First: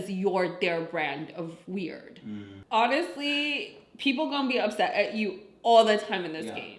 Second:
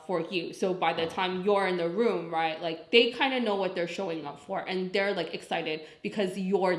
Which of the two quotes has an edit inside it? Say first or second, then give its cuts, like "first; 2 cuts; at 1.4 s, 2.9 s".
first; 1 cut; at 2.5 s